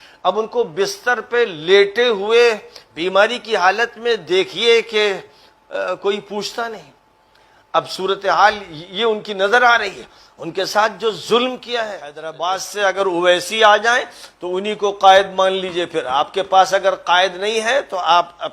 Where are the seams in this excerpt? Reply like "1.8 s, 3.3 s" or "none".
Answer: 12.3 s